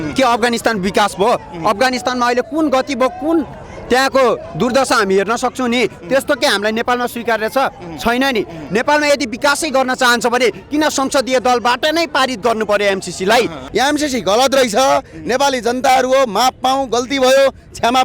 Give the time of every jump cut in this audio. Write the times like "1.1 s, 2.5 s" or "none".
13.6 s